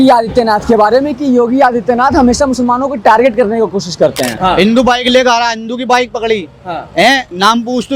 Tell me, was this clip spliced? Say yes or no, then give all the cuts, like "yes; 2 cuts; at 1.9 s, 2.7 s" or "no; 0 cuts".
yes; 1 cut; at 4.3 s